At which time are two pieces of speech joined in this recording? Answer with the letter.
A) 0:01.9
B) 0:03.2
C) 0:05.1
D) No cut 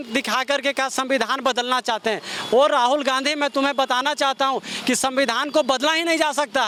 D